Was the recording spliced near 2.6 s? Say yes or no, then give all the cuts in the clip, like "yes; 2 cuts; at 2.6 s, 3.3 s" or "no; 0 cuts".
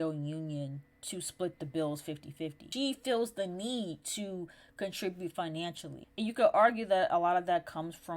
yes; 1 cut; at 2.6 s